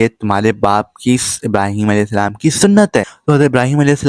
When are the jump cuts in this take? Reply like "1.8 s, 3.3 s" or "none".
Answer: 3.1 s